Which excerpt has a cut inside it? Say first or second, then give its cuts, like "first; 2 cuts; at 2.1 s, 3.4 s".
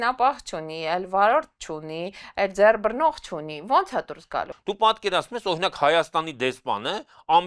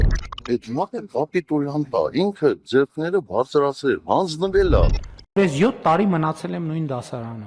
first; 1 cut; at 4.5 s